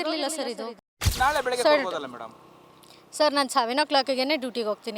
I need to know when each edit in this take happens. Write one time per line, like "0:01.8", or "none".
0:01.1